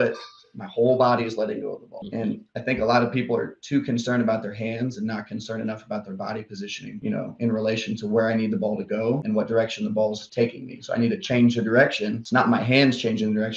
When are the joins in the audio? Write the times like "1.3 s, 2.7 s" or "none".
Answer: 10.2 s